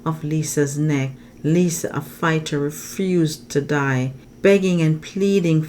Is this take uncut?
no; 2 cuts; at 1.2 s, 4.2 s

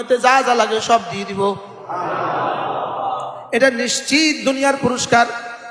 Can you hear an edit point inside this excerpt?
no; 0 cuts

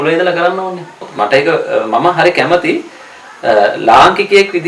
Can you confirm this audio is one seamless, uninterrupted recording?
no; 1 cut; at 1.1 s

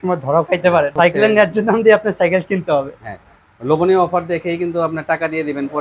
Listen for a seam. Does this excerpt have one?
yes; 1 cut; at 0.9 s

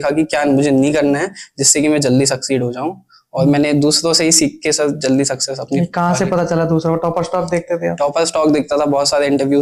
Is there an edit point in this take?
no; 0 cuts

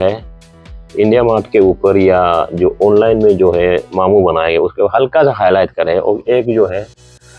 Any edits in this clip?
no; 0 cuts

